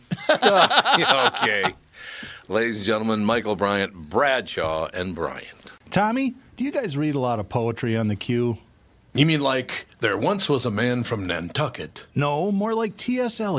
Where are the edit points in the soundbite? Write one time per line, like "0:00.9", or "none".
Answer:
0:05.7